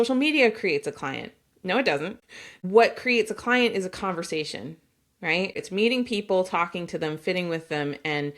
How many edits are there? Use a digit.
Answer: 2